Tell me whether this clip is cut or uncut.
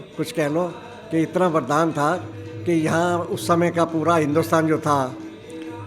uncut